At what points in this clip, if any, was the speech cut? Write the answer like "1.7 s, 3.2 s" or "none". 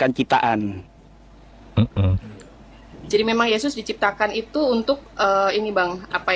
none